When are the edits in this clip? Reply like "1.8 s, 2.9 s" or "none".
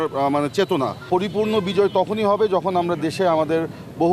1.0 s